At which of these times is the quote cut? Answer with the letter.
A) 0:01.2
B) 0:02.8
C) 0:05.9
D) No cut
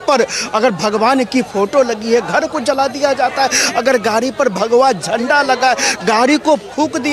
D